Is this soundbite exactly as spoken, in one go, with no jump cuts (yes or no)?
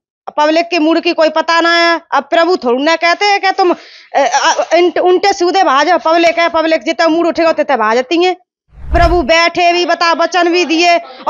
no